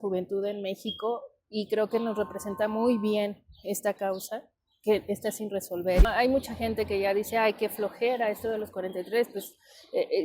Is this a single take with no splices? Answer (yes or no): no